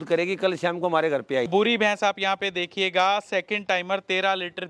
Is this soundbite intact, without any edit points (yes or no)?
no